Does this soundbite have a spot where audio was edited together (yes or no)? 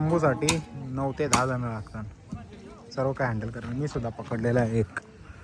no